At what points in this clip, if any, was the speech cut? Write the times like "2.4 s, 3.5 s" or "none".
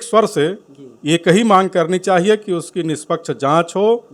none